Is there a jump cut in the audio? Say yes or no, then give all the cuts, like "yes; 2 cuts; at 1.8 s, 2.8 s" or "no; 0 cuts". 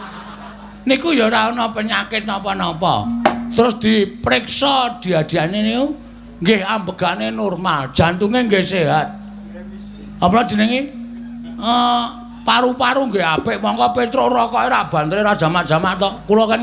no; 0 cuts